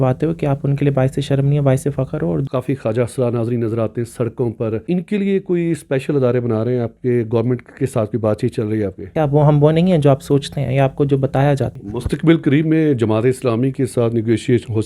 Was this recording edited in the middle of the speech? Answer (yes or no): yes